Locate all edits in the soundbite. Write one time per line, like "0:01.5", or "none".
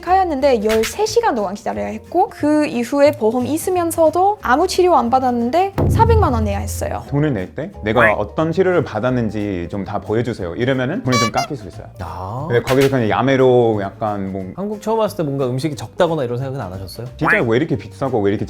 0:07.0
0:14.5
0:17.1